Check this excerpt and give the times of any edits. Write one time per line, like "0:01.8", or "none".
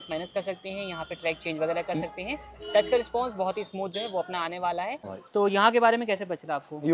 0:05.1